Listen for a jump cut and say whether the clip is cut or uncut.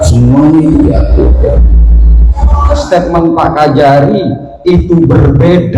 cut